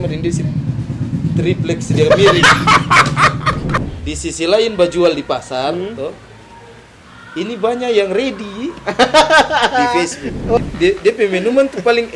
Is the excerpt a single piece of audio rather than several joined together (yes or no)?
no